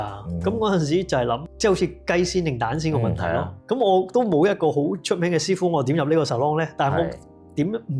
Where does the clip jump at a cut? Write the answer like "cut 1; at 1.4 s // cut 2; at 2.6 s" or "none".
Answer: cut 1; at 1.5 s